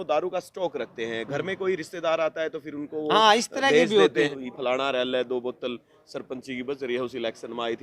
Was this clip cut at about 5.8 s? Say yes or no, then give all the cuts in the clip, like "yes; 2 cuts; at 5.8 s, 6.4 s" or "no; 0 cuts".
no; 1 cut; at 4.3 s